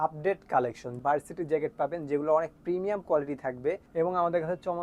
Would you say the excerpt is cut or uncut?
cut